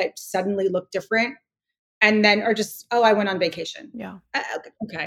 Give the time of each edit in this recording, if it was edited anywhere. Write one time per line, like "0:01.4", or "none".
none